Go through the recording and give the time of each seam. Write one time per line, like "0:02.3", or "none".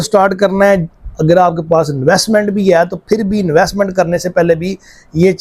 none